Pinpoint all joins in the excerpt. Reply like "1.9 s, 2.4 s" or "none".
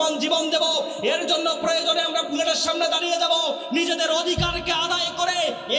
none